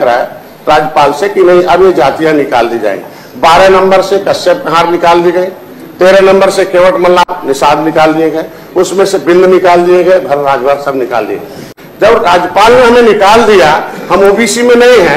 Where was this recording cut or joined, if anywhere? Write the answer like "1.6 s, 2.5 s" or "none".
7.2 s, 11.7 s